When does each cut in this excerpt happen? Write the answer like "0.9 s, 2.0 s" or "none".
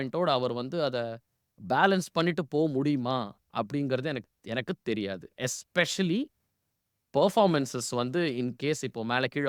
none